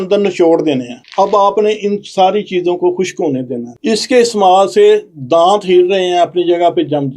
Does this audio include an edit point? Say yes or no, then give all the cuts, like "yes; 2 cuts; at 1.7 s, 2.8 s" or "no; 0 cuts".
yes; 2 cuts; at 1.0 s, 3.7 s